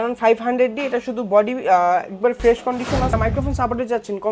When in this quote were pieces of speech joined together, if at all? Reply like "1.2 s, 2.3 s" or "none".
3.1 s